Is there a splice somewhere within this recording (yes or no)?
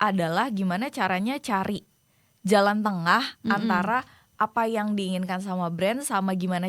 no